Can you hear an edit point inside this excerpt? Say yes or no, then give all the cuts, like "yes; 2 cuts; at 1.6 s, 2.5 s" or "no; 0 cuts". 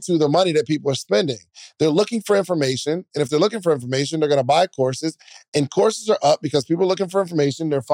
yes; 1 cut; at 0.9 s